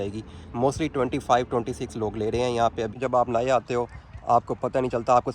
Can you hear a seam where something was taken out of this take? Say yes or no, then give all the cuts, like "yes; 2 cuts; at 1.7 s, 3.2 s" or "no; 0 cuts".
yes; 1 cut; at 3.0 s